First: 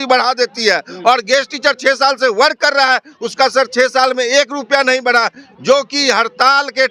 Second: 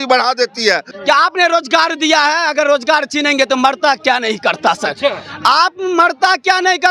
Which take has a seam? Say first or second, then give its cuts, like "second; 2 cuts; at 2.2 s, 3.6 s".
second; 1 cut; at 0.9 s